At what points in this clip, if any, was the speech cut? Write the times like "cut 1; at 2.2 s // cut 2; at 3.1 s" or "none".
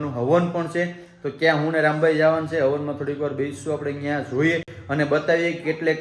none